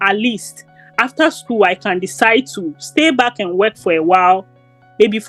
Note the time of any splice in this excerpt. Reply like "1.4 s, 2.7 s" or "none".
none

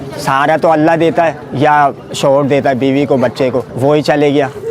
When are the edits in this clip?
1.4 s, 3.7 s

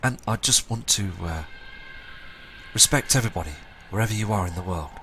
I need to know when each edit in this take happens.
2.6 s

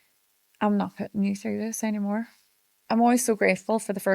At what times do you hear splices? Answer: 2.7 s

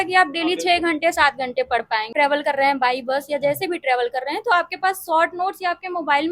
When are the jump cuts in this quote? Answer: 2.1 s

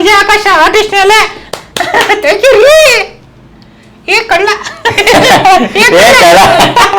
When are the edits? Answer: 1.4 s

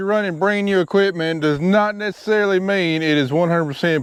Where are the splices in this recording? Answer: none

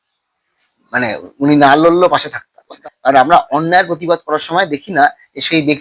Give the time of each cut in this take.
2.8 s

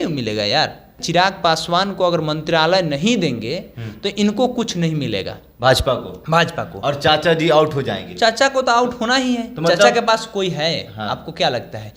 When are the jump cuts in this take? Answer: 1.0 s

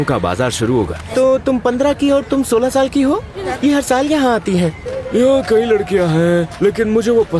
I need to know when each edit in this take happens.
1.0 s, 3.4 s, 4.9 s

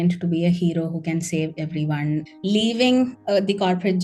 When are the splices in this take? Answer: 2.3 s

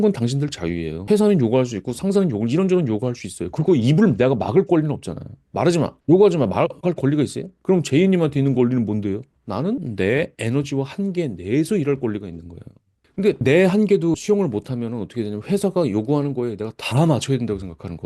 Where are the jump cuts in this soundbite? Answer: 0.9 s, 7.5 s, 9.9 s, 13.2 s

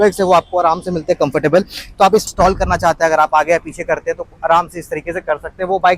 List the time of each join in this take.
2.3 s

